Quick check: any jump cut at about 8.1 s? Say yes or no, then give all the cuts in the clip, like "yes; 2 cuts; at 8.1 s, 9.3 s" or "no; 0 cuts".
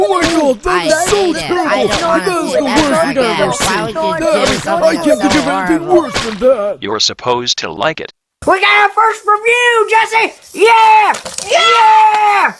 yes; 1 cut; at 8.1 s